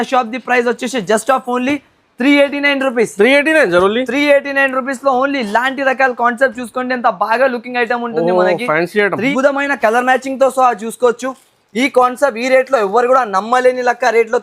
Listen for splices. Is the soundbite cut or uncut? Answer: cut